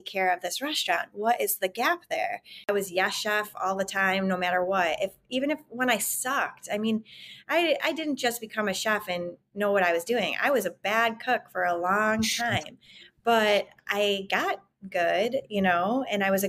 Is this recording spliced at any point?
yes; 1 cut; at 2.7 s

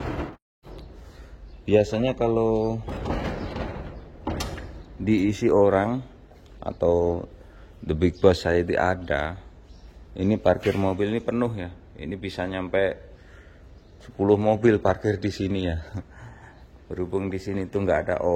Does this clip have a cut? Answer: no; 0 cuts

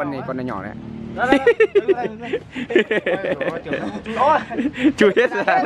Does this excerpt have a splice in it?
no; 0 cuts

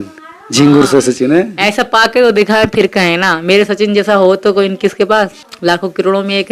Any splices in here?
yes; 1 cut; at 5.4 s

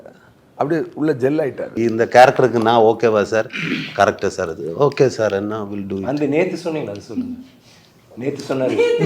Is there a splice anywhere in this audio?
yes; 1 cut; at 1.7 s

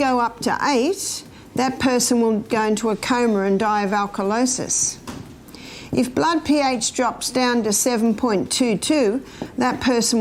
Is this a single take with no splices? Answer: yes; 0 cuts

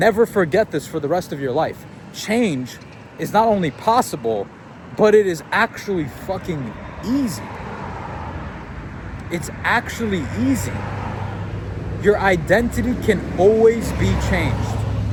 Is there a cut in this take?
no; 0 cuts

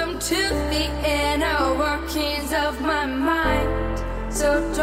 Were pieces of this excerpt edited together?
no; 0 cuts

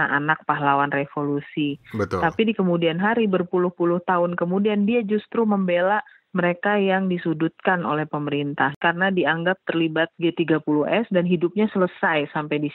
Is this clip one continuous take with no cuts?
no; 1 cut; at 8.8 s

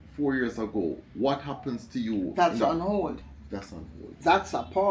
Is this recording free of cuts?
yes; 0 cuts

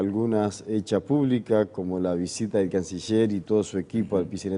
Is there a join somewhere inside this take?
yes; 1 cut; at 3.1 s

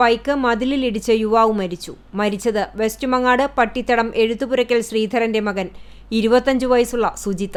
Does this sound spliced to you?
no; 0 cuts

